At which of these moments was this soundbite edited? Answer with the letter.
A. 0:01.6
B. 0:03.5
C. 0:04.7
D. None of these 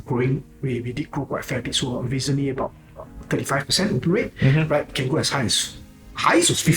D